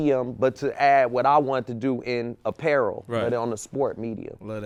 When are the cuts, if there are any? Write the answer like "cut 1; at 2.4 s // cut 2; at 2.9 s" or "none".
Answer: none